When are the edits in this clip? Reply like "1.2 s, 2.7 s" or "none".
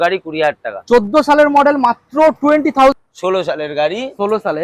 2.9 s